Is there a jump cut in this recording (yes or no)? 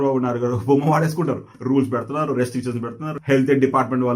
yes